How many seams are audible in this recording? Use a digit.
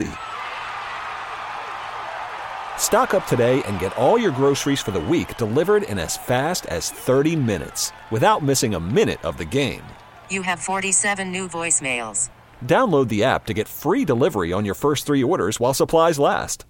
0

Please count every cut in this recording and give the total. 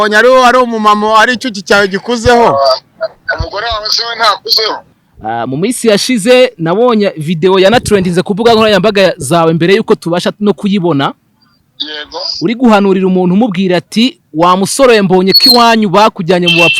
1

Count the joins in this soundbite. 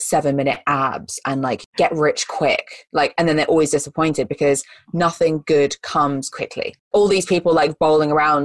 2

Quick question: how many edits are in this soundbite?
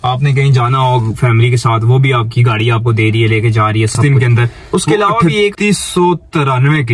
1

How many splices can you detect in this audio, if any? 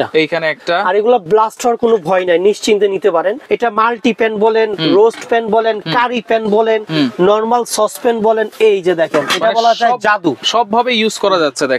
1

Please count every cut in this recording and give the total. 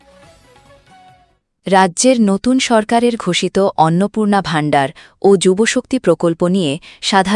1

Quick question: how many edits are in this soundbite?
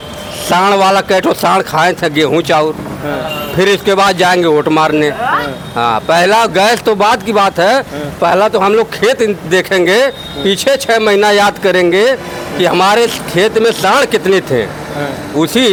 0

